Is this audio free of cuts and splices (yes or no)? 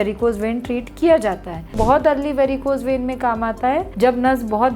no